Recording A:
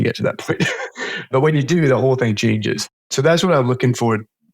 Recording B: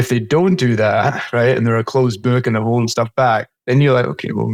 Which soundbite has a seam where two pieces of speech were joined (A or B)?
A